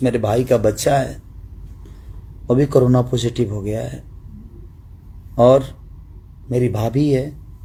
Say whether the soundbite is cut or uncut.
uncut